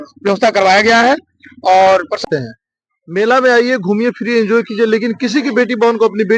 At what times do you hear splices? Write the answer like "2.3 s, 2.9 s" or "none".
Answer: 2.2 s